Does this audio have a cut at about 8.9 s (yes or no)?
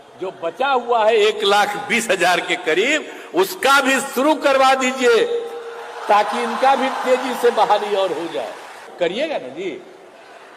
yes